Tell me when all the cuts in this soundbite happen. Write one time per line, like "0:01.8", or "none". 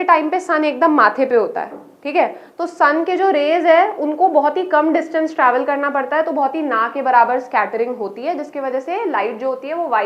none